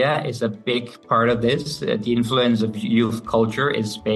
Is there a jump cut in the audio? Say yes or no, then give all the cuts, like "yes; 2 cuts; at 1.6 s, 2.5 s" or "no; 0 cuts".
no; 0 cuts